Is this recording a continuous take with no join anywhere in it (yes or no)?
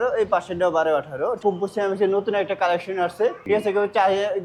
no